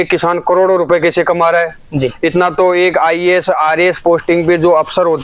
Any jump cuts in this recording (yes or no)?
no